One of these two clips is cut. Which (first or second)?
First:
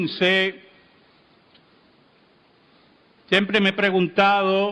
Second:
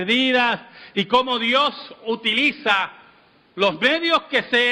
second